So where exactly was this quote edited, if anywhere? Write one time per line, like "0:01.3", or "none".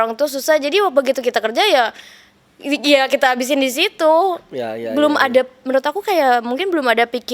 none